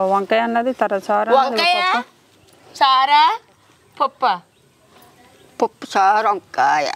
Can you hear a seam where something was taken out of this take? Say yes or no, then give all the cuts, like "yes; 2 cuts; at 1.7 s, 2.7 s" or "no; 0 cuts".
no; 0 cuts